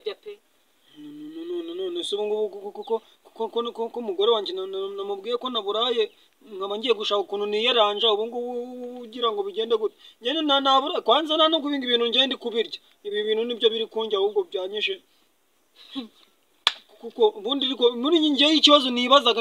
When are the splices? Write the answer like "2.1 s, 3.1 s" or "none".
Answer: none